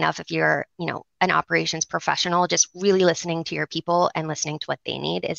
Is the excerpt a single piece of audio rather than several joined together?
yes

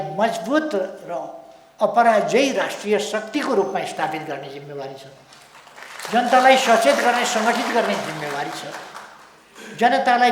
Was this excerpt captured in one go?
yes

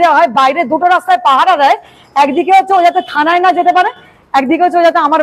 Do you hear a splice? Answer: no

